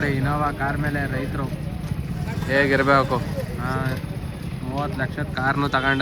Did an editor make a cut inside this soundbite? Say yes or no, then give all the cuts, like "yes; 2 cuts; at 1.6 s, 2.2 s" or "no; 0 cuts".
no; 0 cuts